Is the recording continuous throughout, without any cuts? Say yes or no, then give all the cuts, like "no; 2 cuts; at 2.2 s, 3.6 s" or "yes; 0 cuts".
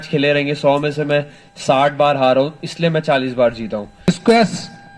no; 1 cut; at 4.1 s